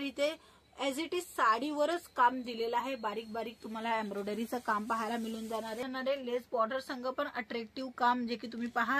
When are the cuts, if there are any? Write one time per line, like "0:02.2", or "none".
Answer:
0:05.8